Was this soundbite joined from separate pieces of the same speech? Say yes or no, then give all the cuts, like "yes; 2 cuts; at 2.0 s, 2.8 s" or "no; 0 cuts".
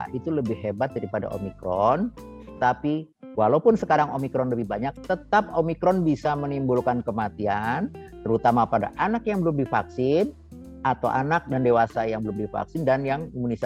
no; 0 cuts